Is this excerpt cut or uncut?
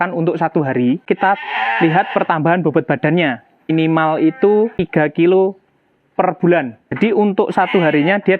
cut